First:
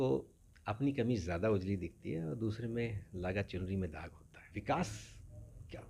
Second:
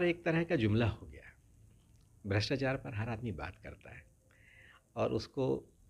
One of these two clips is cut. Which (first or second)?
first